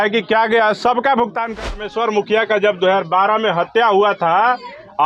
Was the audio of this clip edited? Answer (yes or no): yes